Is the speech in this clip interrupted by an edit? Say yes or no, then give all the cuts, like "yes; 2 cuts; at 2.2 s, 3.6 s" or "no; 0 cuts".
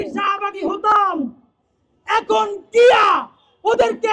no; 0 cuts